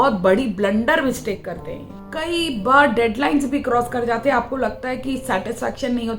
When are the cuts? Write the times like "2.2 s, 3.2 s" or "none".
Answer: 2.1 s